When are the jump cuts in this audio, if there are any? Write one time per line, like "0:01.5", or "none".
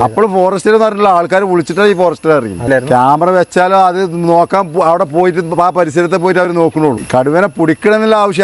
0:02.6
0:07.0

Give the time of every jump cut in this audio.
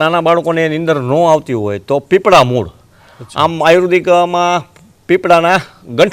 none

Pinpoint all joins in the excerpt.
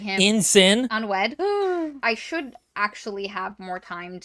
0:00.9
0:02.0

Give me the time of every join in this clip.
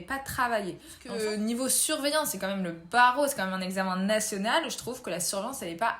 0:01.0

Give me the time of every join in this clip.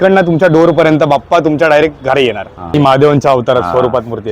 0:02.7

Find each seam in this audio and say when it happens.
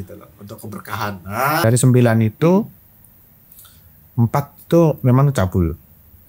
0:01.6

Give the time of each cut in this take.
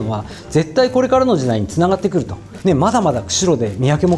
0:02.4

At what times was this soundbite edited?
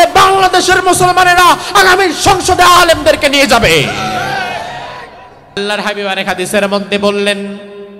0:05.6

